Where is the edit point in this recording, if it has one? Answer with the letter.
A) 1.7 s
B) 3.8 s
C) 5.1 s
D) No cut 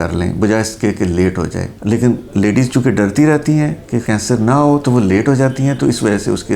A